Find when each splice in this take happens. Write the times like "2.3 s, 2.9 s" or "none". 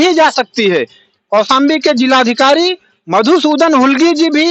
1.0 s